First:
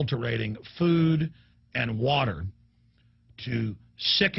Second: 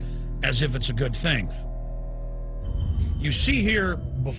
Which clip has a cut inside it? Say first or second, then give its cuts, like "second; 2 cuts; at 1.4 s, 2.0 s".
second; 1 cut; at 3.4 s